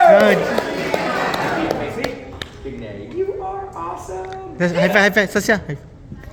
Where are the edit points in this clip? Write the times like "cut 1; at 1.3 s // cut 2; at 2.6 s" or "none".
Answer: none